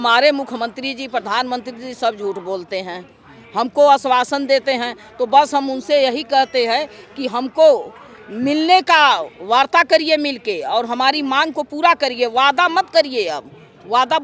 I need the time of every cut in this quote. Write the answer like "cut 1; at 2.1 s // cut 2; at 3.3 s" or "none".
none